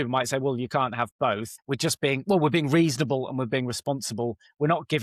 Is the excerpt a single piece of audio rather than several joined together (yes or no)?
no